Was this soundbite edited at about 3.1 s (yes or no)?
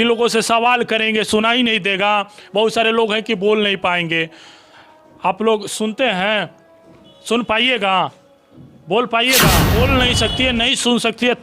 no